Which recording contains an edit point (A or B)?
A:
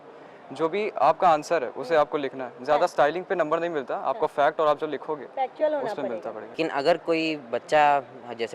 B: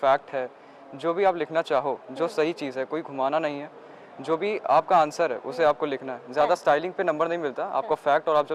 A